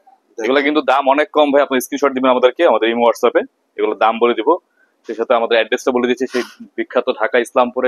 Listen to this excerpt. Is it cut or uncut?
uncut